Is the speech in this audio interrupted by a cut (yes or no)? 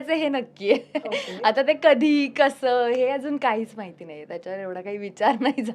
no